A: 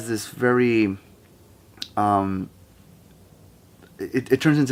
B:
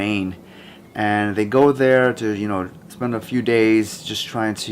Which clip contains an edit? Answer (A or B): B